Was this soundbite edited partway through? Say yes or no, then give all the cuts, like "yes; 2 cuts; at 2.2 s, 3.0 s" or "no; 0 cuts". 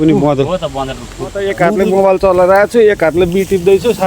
yes; 1 cut; at 1.4 s